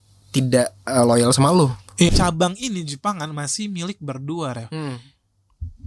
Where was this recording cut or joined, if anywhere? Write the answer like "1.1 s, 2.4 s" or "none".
2.1 s